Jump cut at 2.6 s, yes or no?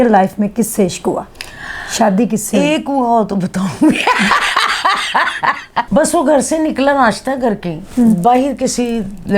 no